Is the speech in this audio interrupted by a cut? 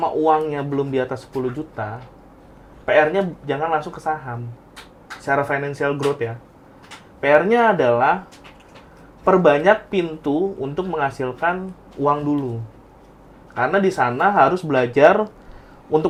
no; 0 cuts

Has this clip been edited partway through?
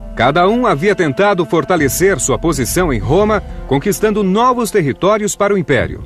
no; 0 cuts

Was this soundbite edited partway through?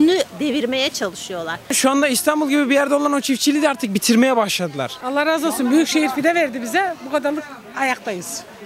yes; 2 cuts; at 1.7 s, 4.9 s

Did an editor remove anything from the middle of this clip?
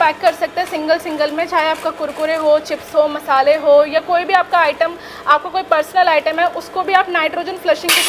no; 0 cuts

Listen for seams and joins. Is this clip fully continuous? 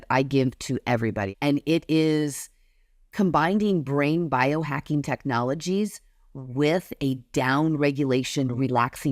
no; 1 cut; at 1.3 s

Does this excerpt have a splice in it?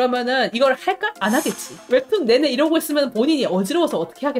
no; 0 cuts

